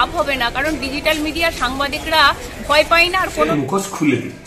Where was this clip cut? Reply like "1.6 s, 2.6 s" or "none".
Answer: 3.5 s